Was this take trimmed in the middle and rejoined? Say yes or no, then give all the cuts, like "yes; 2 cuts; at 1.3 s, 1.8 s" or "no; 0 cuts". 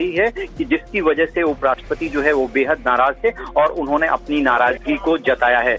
yes; 1 cut; at 2.9 s